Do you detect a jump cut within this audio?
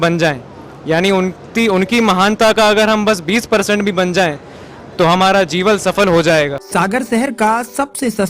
yes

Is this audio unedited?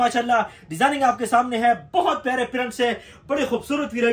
yes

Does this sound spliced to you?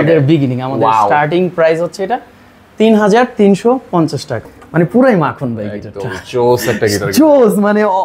yes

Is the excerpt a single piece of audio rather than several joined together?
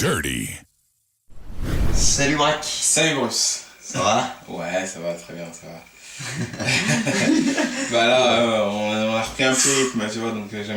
yes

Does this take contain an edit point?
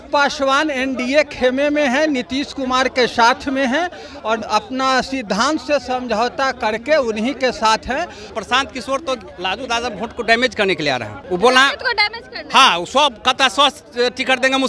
yes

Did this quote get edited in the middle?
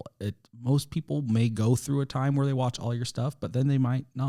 no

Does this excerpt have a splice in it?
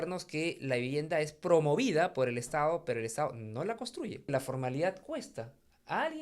yes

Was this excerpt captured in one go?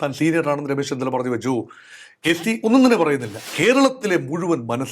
no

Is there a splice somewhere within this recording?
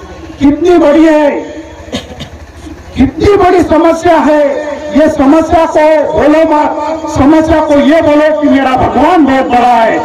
no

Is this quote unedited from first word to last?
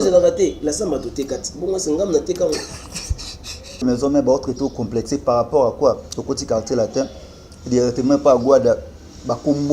no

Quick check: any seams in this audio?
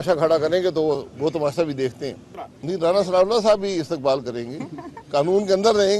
yes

